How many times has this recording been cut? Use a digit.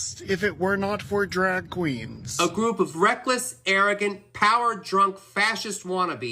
1